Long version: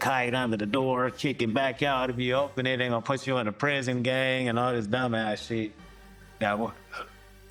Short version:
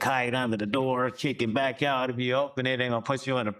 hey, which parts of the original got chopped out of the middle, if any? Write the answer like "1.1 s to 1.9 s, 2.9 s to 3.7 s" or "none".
none